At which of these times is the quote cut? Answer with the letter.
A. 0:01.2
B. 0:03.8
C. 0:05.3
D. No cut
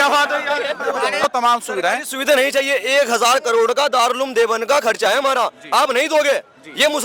A